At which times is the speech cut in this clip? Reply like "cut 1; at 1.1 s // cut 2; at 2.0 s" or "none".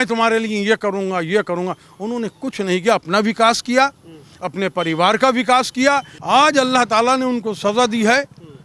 cut 1; at 6.1 s